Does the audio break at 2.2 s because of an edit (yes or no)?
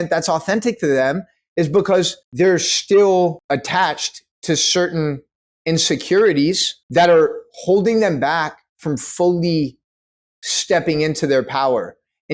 yes